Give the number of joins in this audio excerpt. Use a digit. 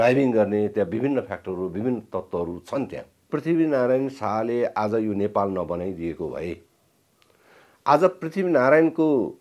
1